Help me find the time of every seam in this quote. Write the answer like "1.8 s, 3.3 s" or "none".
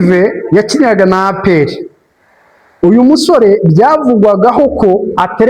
none